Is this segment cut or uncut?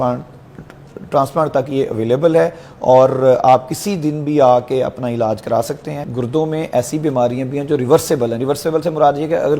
cut